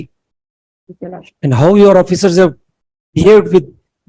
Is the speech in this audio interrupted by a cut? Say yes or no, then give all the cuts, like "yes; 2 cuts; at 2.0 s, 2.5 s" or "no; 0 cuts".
no; 0 cuts